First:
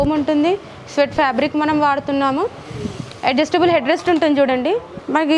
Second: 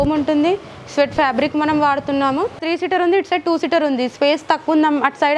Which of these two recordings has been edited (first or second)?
second